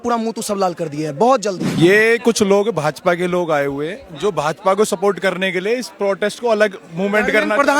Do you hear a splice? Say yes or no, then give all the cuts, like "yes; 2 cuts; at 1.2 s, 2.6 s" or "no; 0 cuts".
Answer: yes; 1 cut; at 1.7 s